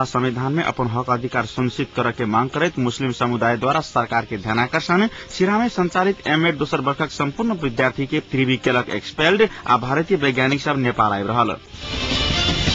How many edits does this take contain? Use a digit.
1